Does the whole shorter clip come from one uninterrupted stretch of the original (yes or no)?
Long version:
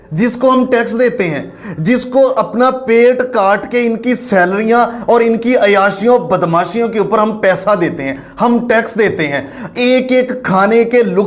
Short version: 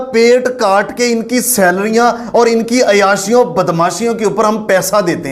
yes